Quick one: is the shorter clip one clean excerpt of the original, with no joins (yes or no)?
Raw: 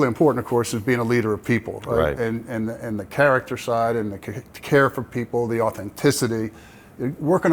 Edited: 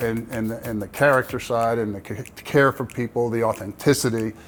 yes